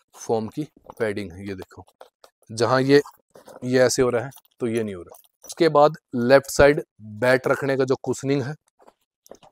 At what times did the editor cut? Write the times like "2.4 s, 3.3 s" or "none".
5.5 s